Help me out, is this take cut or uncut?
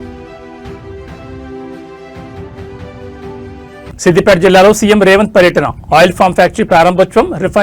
cut